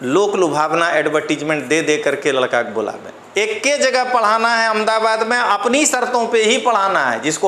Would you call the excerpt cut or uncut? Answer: uncut